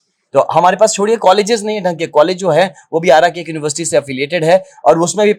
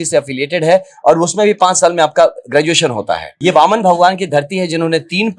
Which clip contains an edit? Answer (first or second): second